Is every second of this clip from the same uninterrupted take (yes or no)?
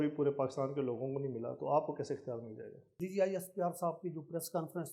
no